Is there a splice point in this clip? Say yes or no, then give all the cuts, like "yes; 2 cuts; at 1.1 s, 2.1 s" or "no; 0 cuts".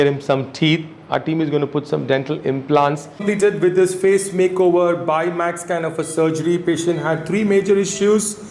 yes; 1 cut; at 3.1 s